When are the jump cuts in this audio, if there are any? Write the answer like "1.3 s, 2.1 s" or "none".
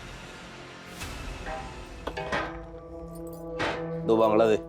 1.5 s